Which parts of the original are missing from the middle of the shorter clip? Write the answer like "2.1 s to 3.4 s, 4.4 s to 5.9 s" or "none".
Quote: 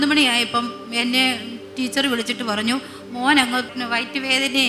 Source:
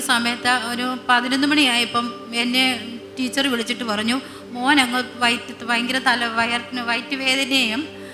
5.1 s to 6.7 s

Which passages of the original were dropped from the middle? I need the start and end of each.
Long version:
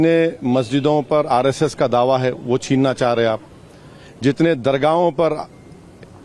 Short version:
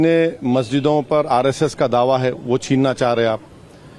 none

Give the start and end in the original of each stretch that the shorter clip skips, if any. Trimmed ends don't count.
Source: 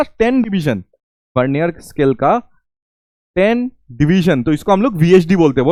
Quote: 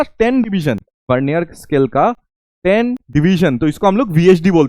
0.9 s to 1.2 s, 3.2 s to 3.8 s

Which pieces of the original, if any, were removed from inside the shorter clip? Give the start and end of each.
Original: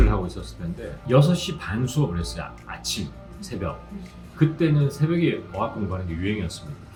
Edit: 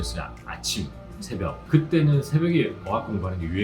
3.8 s to 4.3 s

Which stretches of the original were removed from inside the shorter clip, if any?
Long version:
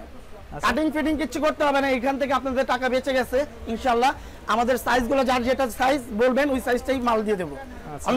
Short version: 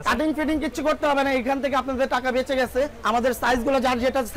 3.5 s to 4.4 s

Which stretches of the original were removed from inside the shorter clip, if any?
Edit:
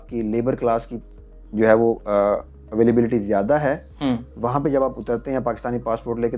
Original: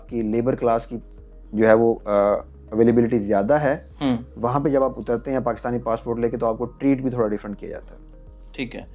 none

